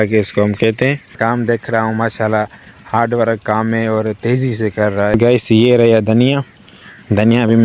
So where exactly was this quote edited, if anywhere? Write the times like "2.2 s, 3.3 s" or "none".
1.1 s, 5.1 s